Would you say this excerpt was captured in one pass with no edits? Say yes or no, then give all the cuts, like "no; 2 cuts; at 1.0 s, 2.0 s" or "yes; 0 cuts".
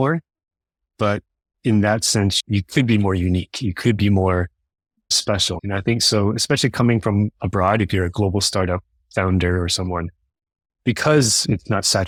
yes; 0 cuts